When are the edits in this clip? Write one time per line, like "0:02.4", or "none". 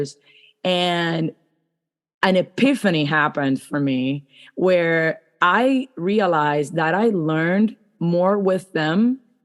none